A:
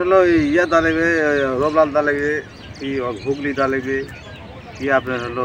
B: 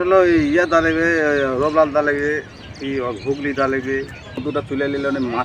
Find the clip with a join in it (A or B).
B